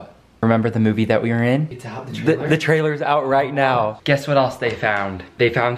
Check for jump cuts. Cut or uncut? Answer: cut